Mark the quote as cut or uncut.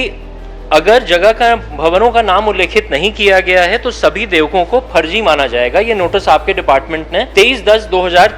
cut